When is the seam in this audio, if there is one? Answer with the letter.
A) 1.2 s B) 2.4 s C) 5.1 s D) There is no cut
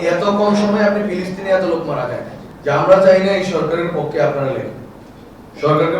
B